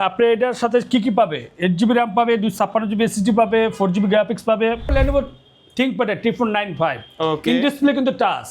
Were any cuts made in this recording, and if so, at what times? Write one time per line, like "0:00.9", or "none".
0:04.9